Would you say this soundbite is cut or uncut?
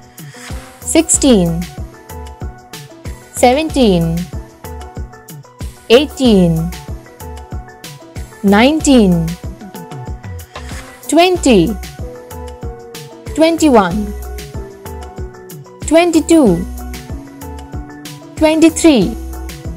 cut